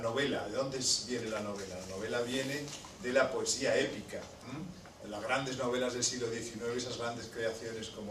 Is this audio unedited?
yes; 0 cuts

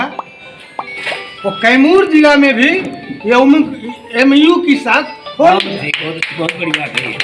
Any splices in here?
no; 0 cuts

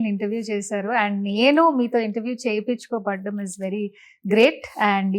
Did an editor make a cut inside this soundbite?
no; 0 cuts

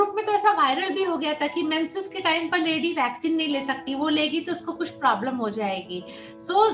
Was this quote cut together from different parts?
no; 0 cuts

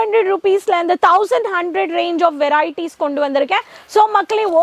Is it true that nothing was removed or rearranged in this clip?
yes; 0 cuts

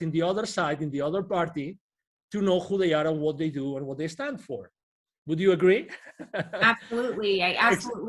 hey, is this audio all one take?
yes; 0 cuts

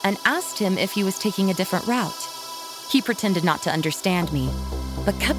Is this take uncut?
yes; 0 cuts

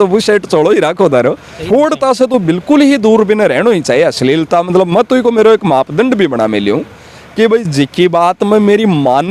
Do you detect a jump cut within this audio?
yes; 1 cut; at 1.5 s

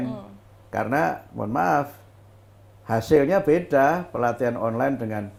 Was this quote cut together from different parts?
no; 0 cuts

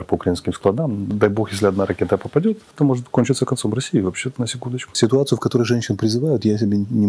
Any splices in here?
yes; 3 cuts; at 1.1 s, 2.7 s, 4.9 s

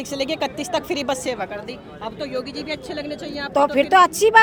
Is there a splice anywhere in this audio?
no; 0 cuts

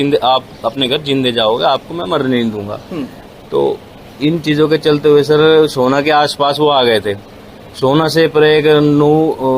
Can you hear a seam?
no; 0 cuts

